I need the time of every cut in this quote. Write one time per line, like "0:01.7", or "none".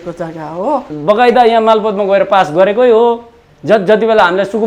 0:00.9